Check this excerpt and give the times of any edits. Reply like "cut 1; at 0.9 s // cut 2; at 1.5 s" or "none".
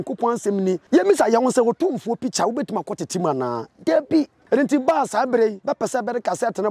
cut 1; at 0.8 s // cut 2; at 4.4 s // cut 3; at 5.6 s